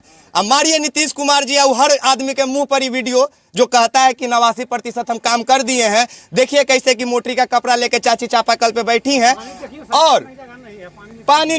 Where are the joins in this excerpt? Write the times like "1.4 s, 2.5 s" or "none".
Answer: none